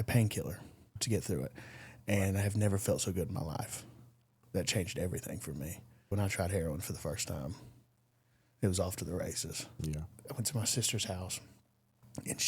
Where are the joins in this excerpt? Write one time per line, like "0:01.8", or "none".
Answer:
0:01.0
0:06.1
0:10.1